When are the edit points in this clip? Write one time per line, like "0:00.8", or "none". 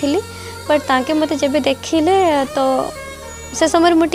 none